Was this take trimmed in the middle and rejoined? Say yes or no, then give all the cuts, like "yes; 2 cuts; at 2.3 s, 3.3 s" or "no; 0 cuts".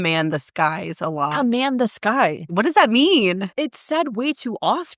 yes; 1 cut; at 2.5 s